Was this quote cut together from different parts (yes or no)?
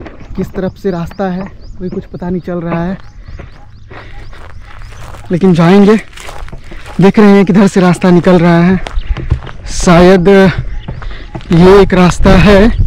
no